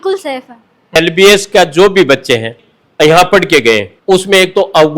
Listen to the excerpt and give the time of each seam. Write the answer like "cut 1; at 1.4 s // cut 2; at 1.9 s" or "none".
cut 1; at 1.0 s // cut 2; at 2.5 s